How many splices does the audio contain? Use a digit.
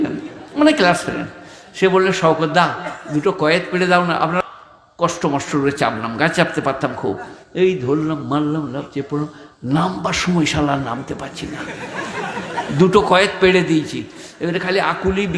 1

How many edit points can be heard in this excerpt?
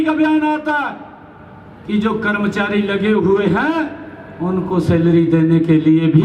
0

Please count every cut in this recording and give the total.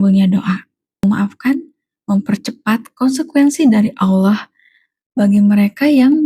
1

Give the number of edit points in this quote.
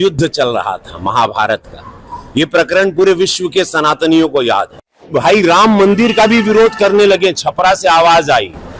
1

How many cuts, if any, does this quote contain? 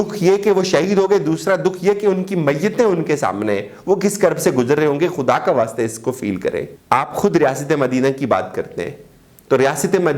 1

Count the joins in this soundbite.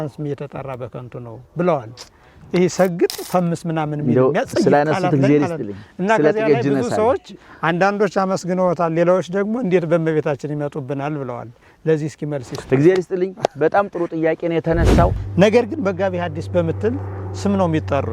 1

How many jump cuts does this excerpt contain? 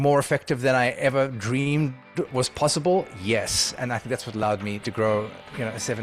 2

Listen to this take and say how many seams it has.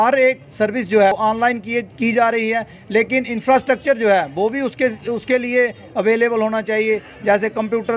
1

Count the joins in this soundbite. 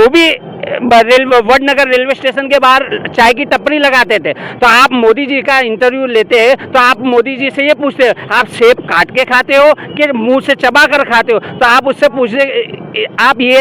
0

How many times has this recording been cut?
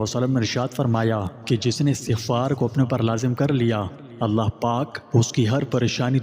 2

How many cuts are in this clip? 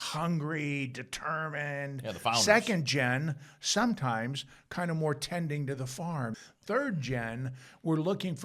1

